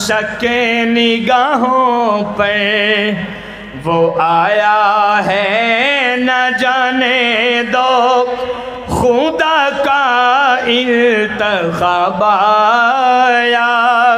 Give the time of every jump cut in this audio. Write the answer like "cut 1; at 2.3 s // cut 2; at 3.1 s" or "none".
none